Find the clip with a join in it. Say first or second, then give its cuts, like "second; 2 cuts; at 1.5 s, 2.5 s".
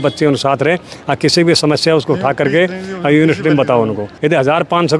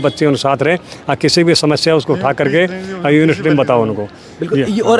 first; 1 cut; at 4.0 s